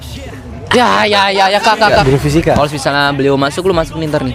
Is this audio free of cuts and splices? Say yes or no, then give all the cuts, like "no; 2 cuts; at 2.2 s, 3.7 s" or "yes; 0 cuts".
no; 1 cut; at 2.0 s